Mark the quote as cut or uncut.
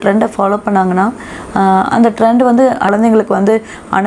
cut